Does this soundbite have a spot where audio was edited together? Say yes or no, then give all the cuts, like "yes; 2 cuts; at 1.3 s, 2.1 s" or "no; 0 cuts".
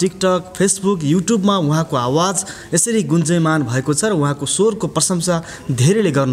no; 0 cuts